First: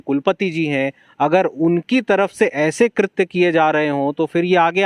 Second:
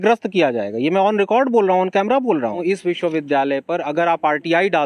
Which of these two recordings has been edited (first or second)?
second